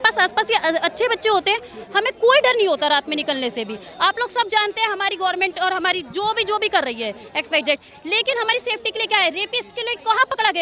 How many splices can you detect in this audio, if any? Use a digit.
0